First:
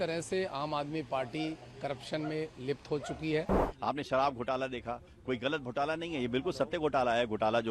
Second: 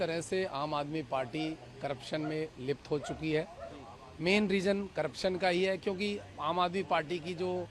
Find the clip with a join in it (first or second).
first